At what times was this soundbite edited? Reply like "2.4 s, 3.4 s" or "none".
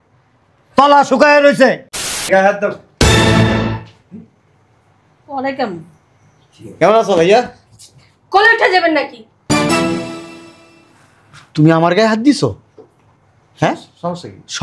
2.2 s